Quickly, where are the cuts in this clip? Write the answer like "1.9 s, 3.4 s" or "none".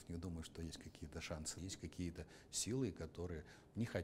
1.6 s

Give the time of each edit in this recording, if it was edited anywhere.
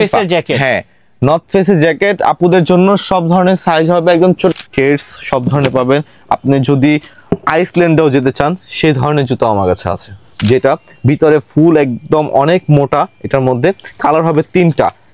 4.5 s, 10.3 s

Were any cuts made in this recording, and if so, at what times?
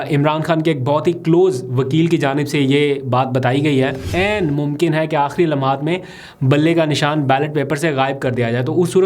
4.1 s

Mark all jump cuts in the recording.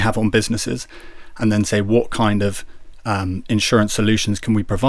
none

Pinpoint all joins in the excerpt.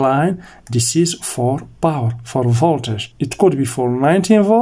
3.0 s

